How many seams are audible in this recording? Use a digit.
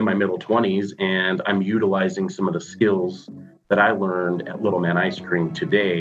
0